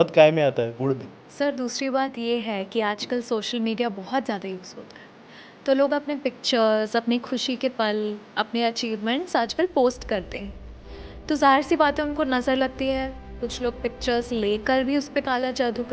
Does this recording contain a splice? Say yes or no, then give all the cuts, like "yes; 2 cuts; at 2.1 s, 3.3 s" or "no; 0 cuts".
yes; 1 cut; at 1.2 s